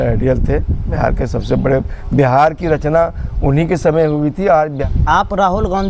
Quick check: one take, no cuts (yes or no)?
no